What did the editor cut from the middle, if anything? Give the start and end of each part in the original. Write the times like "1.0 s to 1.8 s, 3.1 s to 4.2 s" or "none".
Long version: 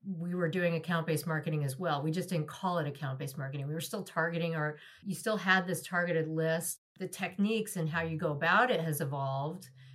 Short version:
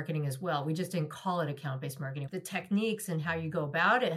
3.5 s to 6.8 s